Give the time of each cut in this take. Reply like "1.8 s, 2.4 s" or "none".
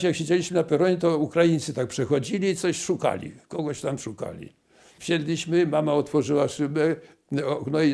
4.9 s